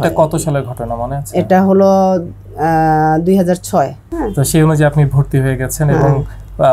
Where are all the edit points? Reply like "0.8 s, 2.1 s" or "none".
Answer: 4.0 s